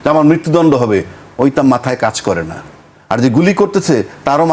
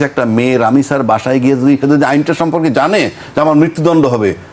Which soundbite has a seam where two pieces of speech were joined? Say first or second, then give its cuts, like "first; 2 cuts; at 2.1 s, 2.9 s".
second; 1 cut; at 1.8 s